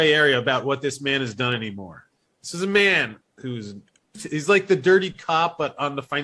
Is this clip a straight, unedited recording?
yes; 0 cuts

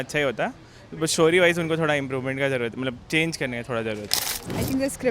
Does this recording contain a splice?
yes; 1 cut; at 4.2 s

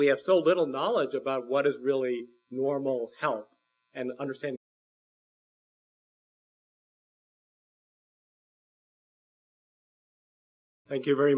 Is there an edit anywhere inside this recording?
no; 0 cuts

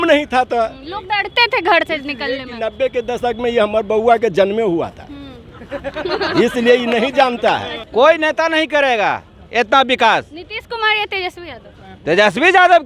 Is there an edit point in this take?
yes; 1 cut; at 7.8 s

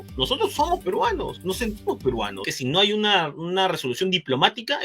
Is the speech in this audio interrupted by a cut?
yes; 1 cut; at 2.5 s

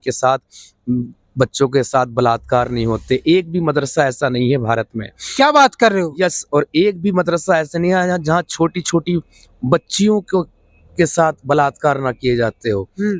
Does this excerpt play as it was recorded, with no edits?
yes; 0 cuts

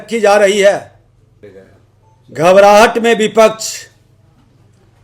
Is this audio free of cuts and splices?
no; 1 cut; at 1.4 s

